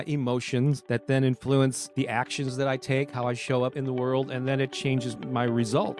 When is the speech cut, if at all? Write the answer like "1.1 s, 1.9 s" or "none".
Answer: 0.8 s, 1.8 s, 3.7 s